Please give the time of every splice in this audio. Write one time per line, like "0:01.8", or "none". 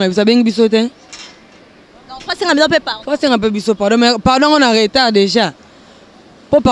none